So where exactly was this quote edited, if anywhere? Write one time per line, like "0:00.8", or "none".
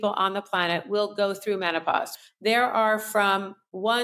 0:02.1